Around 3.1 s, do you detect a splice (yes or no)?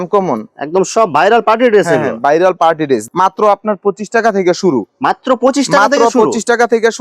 yes